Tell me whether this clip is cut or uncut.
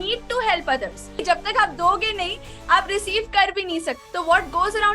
cut